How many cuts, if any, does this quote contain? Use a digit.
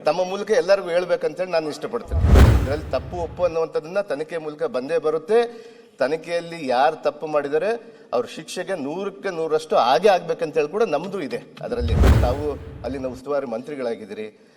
2